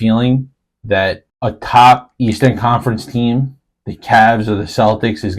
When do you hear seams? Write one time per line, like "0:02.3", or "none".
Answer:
0:01.3